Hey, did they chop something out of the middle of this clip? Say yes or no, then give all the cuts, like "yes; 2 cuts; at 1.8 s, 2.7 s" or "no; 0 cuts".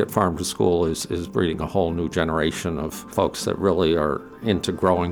yes; 1 cut; at 3.0 s